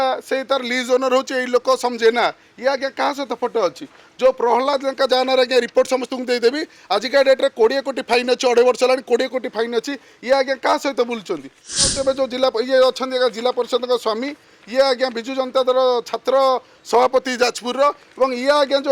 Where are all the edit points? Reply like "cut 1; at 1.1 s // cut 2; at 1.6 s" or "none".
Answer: cut 1; at 11.9 s